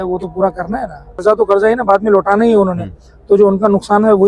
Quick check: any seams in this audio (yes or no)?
yes